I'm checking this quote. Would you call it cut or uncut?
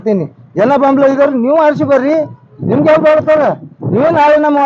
uncut